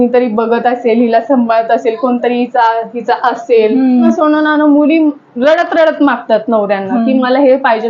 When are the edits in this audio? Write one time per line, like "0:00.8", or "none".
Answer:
0:04.1